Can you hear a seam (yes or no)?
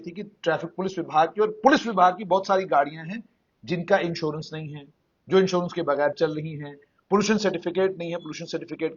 no